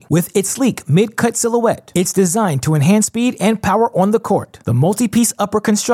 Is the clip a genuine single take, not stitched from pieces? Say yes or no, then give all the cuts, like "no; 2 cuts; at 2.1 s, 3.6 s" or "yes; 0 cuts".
yes; 0 cuts